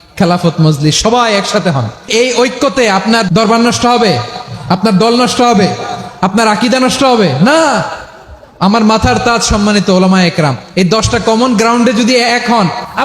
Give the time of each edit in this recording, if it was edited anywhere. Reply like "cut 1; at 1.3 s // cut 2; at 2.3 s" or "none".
cut 1; at 1.9 s // cut 2; at 3.3 s